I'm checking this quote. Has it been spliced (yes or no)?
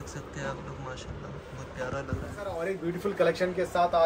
yes